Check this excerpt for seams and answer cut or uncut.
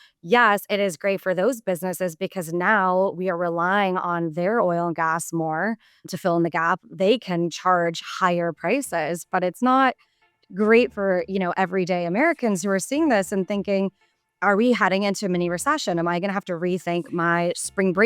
cut